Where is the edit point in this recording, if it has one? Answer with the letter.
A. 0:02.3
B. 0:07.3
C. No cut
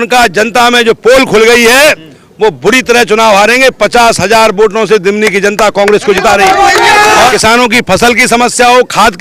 B